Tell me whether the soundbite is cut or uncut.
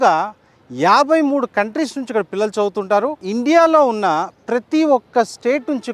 cut